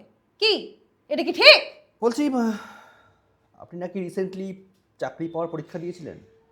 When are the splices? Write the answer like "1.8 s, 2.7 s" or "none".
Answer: 1.8 s